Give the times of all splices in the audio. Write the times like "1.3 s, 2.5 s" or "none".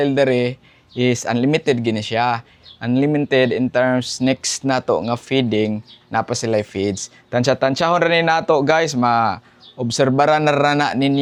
none